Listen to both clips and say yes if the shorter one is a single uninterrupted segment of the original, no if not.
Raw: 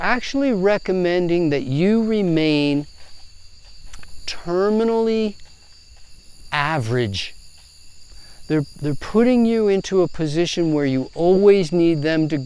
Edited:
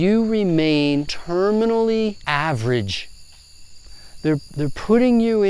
no